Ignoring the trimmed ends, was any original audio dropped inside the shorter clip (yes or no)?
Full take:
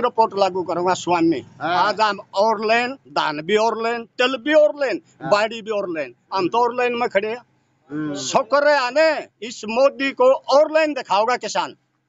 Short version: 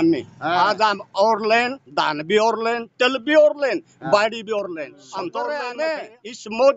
yes